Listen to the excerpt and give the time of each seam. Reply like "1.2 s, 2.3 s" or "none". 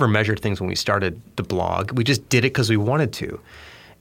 1.2 s